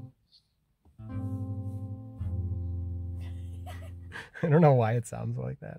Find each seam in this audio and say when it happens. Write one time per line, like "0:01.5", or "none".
none